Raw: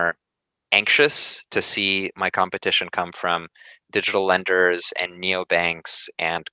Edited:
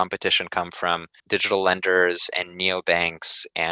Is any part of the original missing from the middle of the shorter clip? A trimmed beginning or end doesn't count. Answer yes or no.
yes